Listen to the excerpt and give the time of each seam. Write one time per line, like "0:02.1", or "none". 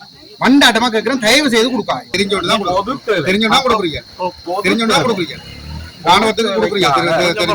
0:02.1